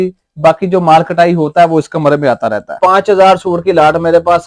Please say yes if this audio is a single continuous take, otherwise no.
no